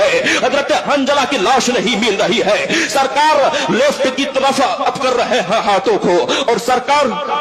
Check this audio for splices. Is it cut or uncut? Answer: uncut